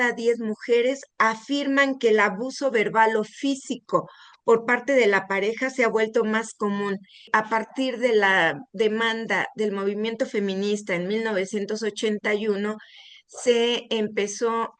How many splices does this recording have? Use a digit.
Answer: 1